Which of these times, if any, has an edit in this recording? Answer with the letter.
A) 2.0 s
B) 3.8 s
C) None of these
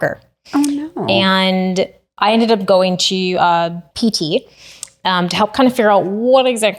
B